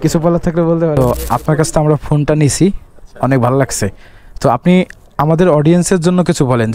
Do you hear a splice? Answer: yes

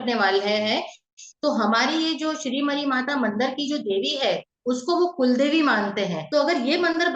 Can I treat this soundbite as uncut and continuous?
no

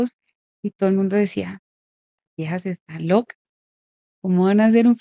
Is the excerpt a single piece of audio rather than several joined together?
yes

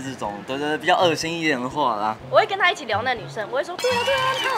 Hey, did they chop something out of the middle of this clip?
yes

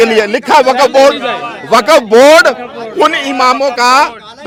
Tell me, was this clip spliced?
no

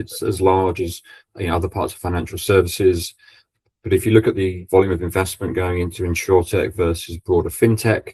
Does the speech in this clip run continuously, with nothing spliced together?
yes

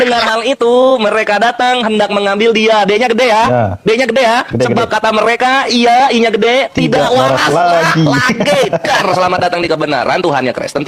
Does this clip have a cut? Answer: no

